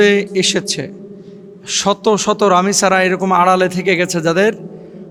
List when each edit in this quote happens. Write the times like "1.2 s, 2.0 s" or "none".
none